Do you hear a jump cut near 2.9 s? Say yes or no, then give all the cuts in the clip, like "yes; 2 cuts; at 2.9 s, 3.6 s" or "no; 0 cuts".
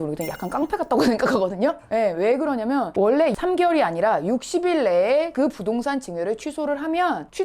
yes; 1 cut; at 2.9 s